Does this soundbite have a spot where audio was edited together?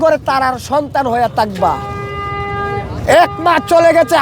no; 0 cuts

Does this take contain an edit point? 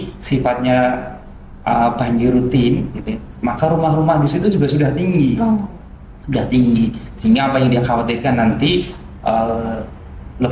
no; 0 cuts

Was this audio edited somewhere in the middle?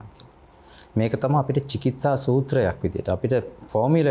no; 0 cuts

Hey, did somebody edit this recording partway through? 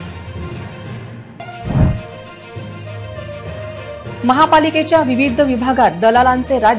yes; 1 cut; at 1.2 s

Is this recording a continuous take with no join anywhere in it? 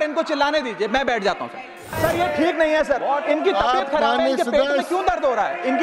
no; 1 cut; at 1.9 s

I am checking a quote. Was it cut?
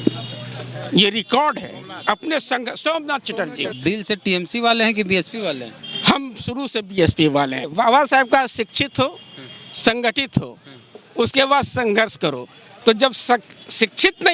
yes; 2 cuts; at 3.7 s, 7.6 s

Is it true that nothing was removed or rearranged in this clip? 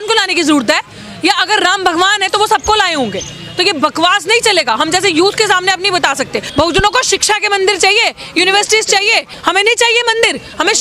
no; 2 cuts; at 6.5 s, 9.3 s

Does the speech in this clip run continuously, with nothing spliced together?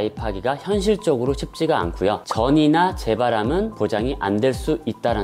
yes; 0 cuts

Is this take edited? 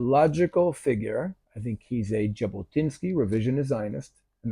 yes; 1 cut; at 1.5 s

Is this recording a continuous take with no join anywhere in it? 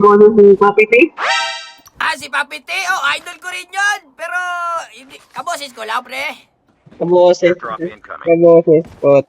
no; 1 cut; at 6.7 s

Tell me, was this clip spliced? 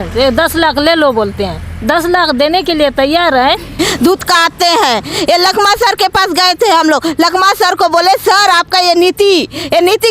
yes; 1 cut; at 3.8 s

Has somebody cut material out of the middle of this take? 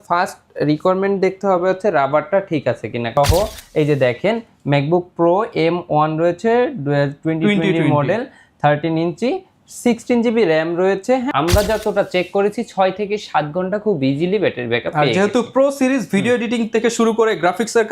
yes; 2 cuts; at 3.2 s, 11.3 s

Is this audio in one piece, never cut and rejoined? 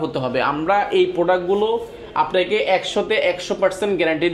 yes; 0 cuts

